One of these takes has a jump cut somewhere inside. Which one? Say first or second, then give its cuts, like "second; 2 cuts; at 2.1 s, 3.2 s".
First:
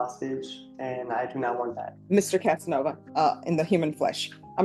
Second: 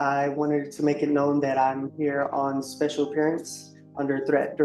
first; 2 cuts; at 1.9 s, 3.0 s